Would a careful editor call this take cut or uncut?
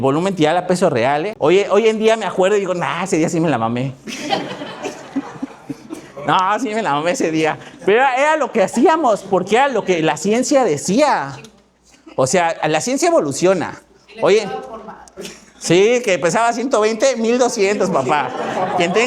cut